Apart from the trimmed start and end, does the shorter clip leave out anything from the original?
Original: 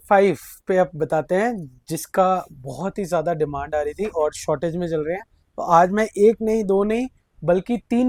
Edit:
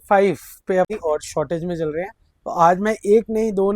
yes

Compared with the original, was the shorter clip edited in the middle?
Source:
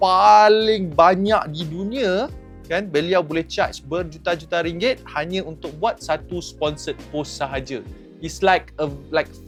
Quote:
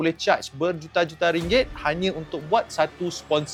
no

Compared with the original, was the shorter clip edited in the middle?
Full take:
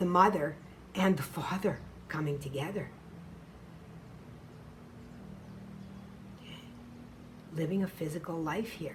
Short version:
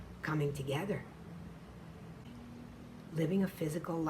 yes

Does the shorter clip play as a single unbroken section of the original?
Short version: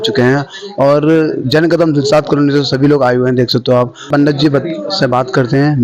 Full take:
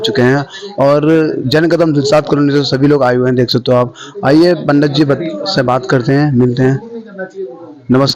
no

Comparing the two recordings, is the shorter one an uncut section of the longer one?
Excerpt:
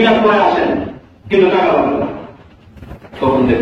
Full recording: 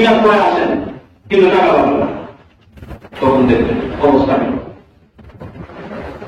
yes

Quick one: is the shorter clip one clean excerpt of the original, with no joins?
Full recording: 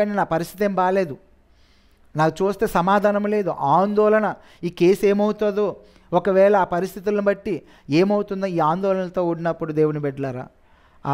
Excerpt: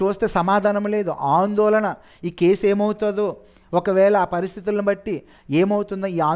yes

